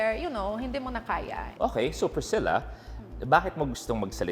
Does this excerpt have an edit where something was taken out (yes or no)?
yes